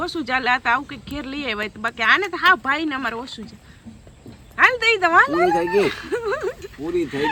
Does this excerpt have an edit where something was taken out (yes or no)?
no